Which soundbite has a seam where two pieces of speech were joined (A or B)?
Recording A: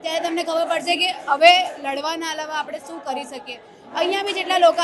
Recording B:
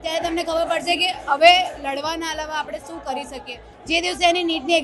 B